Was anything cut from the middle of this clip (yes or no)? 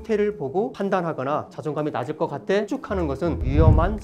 no